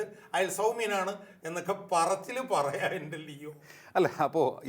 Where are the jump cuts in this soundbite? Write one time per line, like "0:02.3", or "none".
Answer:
none